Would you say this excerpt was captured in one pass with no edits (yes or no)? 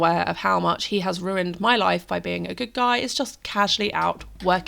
yes